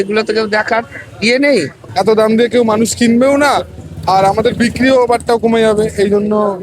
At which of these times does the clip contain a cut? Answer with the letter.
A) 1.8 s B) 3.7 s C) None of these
A